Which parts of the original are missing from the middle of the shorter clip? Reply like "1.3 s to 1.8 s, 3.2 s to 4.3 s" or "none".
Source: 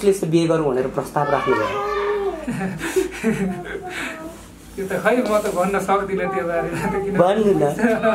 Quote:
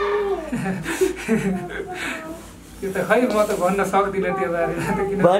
none